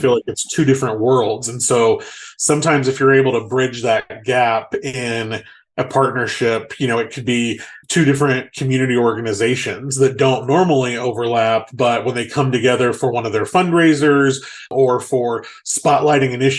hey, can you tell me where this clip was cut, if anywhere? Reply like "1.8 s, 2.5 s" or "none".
7.7 s, 14.7 s

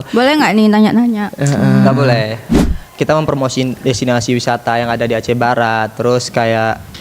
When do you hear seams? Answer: 2.5 s

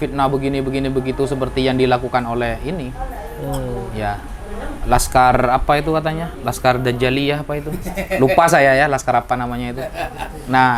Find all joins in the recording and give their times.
none

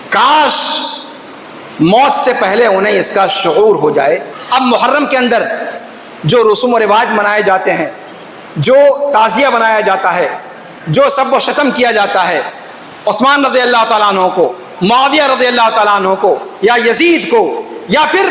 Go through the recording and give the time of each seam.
4.3 s

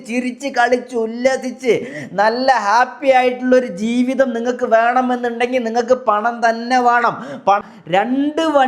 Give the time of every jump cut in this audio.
7.6 s

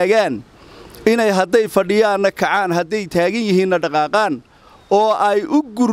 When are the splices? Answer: none

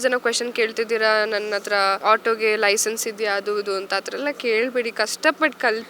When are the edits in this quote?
2.0 s

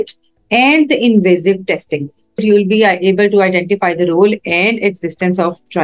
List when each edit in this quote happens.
2.4 s

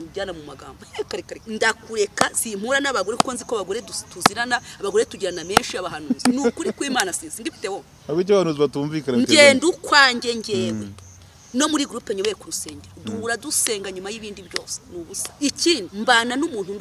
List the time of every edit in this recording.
1.4 s, 15.2 s, 15.9 s

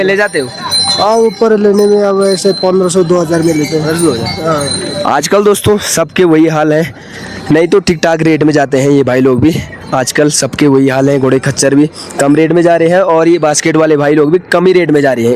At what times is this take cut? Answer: none

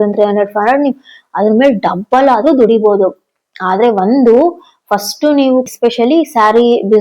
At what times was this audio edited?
5.7 s

